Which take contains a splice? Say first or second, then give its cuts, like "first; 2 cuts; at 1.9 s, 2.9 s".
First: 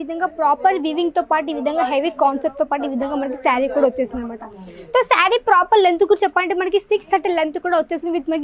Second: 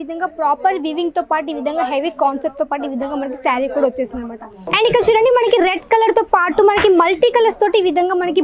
second; 1 cut; at 4.6 s